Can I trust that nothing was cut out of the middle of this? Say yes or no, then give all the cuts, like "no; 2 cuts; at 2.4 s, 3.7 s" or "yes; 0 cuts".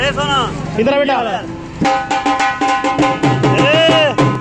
yes; 0 cuts